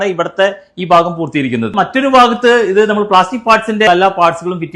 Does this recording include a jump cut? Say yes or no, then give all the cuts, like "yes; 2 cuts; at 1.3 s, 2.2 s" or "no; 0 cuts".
yes; 2 cuts; at 1.7 s, 3.9 s